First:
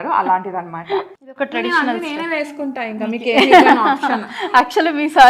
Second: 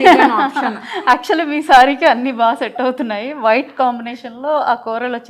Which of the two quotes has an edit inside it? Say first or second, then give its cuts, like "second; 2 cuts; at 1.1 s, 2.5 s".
first; 1 cut; at 1.1 s